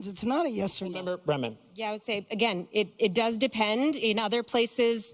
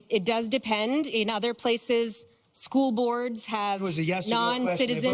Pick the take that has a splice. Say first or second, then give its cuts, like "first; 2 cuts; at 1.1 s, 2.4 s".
first; 1 cut; at 1.1 s